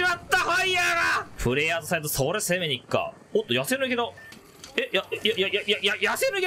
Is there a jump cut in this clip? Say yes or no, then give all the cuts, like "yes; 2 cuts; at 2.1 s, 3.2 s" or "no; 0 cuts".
yes; 1 cut; at 1.3 s